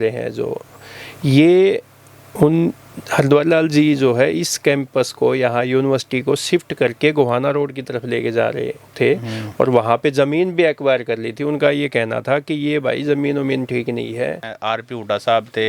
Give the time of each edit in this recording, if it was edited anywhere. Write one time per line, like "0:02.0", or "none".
0:14.5